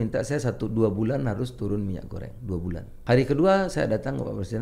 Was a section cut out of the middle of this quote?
yes; 1 cut; at 2.9 s

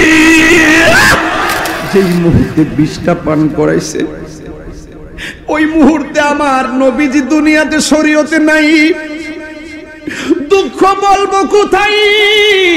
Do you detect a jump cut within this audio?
yes; 1 cut; at 1.7 s

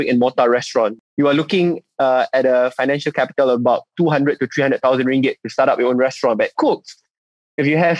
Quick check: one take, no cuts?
no; 1 cut; at 1.0 s

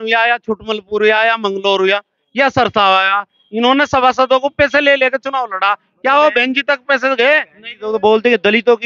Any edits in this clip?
no; 0 cuts

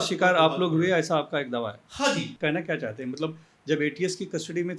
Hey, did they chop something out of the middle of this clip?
yes; 1 cut; at 2.3 s

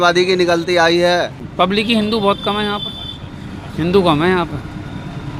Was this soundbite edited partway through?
yes; 1 cut; at 1.4 s

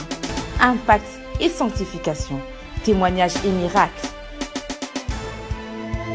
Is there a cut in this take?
no; 0 cuts

